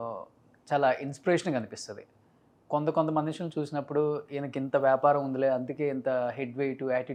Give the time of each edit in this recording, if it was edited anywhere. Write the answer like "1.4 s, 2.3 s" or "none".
none